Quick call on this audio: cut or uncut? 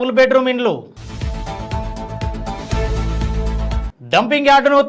cut